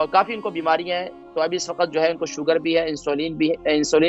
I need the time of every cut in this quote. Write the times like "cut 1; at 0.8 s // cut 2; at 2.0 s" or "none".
none